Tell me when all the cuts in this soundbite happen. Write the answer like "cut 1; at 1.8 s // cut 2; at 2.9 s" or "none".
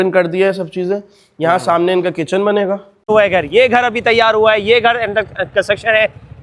cut 1; at 3.1 s